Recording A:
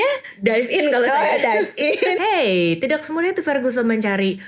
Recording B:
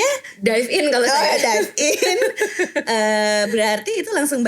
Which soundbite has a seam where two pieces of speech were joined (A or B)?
A